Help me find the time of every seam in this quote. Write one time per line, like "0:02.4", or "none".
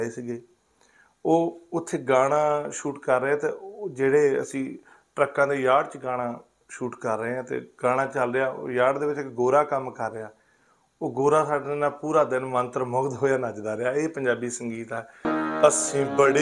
0:15.3